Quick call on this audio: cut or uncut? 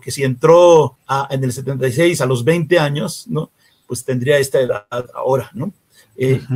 cut